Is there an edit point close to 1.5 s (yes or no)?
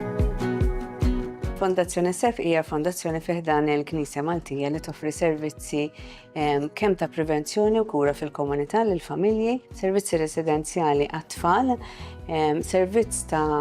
yes